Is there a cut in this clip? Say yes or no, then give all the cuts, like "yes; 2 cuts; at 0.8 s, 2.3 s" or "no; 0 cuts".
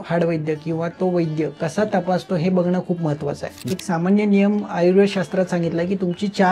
yes; 1 cut; at 3.7 s